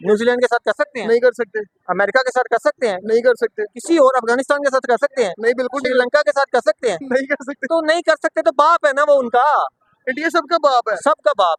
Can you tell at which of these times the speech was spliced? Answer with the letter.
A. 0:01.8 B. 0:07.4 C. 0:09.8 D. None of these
D